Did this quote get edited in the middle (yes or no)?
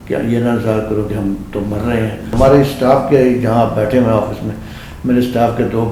yes